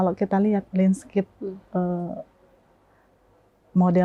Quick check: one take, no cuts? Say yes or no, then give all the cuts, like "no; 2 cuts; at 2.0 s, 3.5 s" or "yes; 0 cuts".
yes; 0 cuts